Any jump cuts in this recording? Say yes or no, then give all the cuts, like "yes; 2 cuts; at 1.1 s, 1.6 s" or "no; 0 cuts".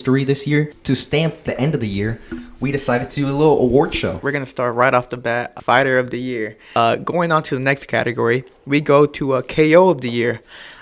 yes; 4 cuts; at 0.9 s, 4.2 s, 5.5 s, 6.8 s